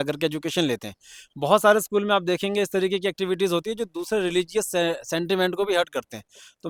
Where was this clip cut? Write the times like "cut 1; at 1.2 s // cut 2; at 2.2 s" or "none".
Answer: none

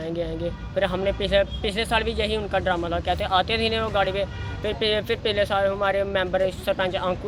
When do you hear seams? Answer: none

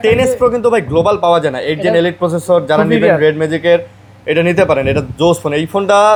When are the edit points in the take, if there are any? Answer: none

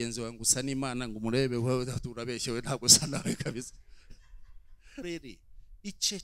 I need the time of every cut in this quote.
cut 1; at 5.0 s

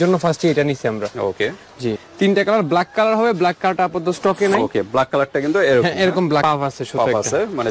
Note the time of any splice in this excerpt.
cut 1; at 2.1 s // cut 2; at 6.4 s

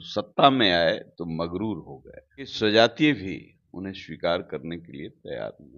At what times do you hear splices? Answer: cut 1; at 2.5 s

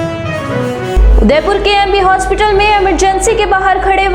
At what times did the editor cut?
none

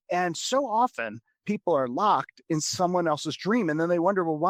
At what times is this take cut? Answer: none

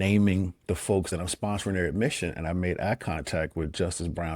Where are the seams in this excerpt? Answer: cut 1; at 1.1 s

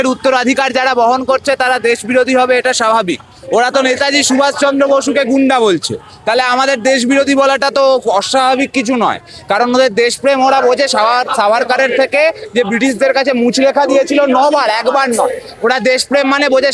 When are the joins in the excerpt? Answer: none

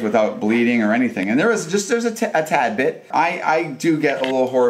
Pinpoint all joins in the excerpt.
cut 1; at 3.0 s

